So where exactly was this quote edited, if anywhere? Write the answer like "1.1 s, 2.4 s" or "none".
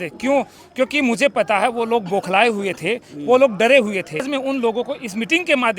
4.3 s